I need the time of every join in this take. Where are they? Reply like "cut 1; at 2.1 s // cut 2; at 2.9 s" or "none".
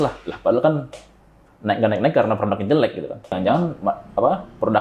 cut 1; at 3.2 s